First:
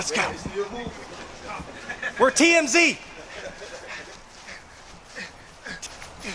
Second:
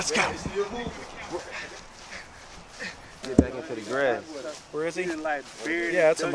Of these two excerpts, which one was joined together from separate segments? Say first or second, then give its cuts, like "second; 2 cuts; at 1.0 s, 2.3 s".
second; 2 cuts; at 1.3 s, 3.2 s